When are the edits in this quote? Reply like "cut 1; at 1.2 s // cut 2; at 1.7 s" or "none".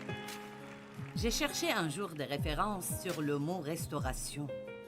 cut 1; at 1.2 s